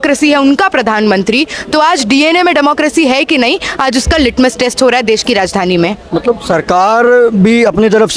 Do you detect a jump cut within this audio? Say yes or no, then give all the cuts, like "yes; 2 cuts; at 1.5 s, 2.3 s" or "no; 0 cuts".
no; 0 cuts